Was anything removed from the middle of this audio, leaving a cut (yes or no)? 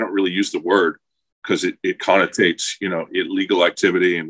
no